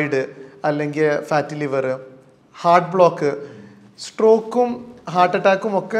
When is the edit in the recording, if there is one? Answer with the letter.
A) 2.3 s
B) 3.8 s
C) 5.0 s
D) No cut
D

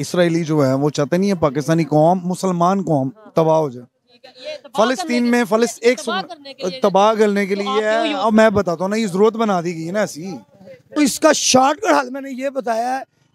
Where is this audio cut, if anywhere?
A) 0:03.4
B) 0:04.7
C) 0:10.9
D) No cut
C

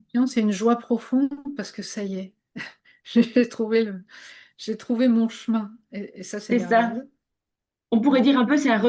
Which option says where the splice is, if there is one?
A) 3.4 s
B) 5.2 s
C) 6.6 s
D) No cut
D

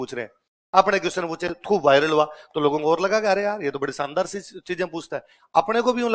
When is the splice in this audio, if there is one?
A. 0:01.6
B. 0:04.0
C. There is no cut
C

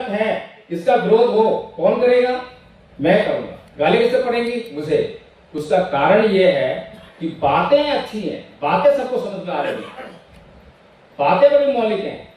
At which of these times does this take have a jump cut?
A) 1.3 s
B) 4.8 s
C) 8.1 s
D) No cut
D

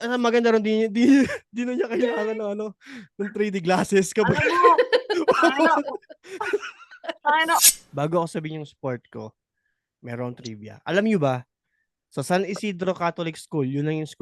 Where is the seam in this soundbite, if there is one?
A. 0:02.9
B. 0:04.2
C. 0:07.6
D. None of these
C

